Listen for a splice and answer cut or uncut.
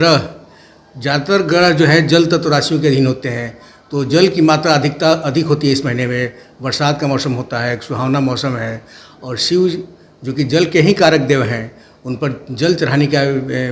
uncut